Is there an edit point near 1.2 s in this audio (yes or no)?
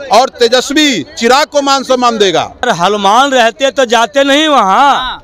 no